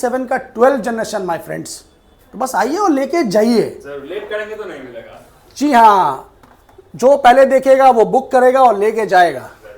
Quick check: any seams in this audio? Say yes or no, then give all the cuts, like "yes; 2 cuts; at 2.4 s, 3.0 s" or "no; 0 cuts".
no; 0 cuts